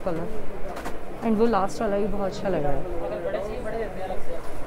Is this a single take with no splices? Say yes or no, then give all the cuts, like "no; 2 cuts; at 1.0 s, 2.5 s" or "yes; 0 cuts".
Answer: yes; 0 cuts